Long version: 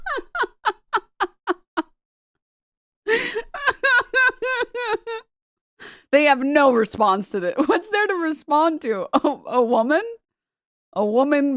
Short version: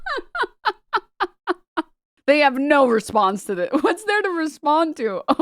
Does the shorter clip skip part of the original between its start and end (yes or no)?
yes